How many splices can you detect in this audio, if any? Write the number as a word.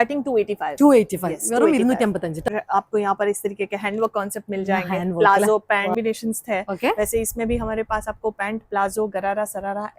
two